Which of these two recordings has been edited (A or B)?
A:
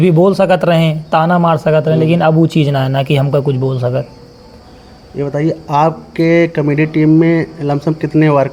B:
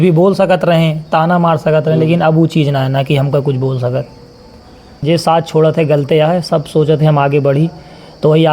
B